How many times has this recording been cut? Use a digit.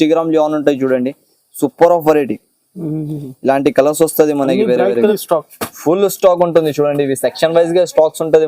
1